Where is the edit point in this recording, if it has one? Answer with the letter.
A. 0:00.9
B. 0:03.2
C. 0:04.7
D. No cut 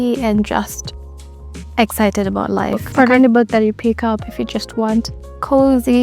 B